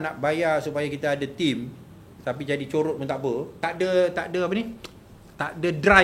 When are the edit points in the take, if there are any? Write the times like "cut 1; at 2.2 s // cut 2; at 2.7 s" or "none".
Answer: cut 1; at 3.5 s